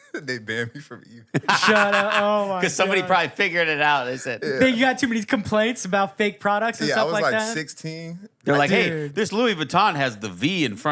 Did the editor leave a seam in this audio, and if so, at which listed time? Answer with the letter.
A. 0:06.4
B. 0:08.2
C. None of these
B